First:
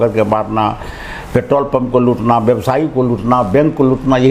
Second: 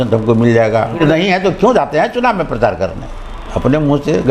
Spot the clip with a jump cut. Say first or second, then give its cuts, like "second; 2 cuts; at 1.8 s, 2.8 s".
second; 1 cut; at 1.0 s